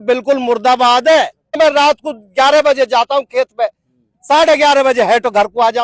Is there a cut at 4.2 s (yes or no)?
no